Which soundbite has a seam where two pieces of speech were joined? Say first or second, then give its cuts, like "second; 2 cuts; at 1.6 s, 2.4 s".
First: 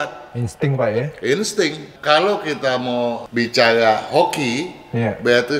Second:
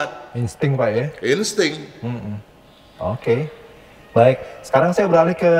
first; 1 cut; at 1.9 s